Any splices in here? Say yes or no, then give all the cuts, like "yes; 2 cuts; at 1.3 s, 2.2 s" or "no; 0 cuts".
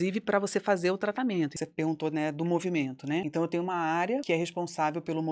yes; 3 cuts; at 1.5 s, 3.3 s, 4.2 s